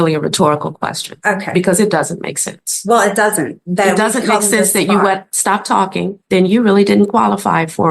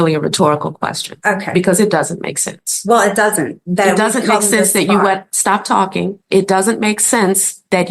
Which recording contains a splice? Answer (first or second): first